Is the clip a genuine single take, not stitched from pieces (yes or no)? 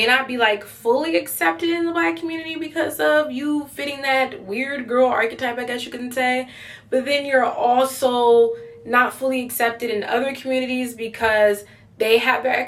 yes